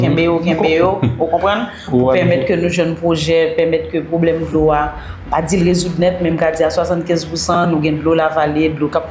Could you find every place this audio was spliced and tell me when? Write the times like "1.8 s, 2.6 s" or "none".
none